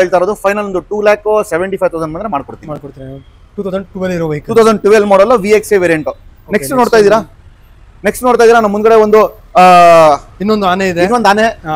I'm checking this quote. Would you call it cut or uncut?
uncut